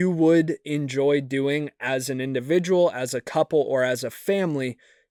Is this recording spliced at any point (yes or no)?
no